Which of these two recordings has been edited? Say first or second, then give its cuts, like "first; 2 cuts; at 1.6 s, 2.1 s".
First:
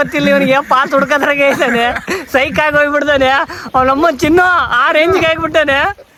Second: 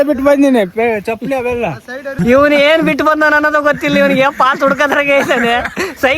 second; 1 cut; at 2.2 s